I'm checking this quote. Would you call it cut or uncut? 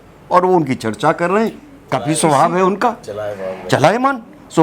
cut